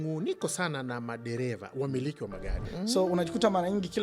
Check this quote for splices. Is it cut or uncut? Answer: cut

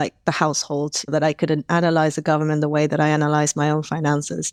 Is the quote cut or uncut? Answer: uncut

